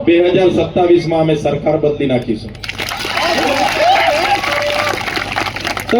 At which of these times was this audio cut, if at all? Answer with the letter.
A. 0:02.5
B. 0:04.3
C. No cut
C